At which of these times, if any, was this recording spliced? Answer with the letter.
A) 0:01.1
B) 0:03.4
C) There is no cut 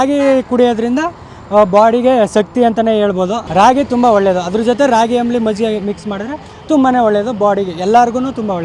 B